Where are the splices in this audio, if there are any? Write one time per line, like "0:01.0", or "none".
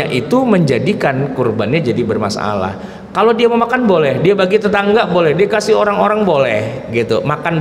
none